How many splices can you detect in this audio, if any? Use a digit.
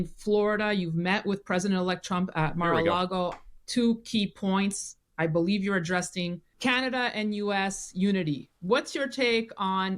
1